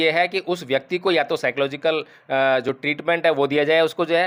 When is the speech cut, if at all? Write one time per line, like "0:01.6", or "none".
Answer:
none